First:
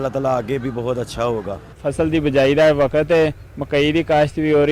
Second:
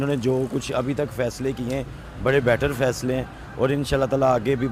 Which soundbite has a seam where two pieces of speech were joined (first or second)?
first